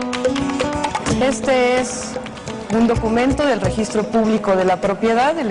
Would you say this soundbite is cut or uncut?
cut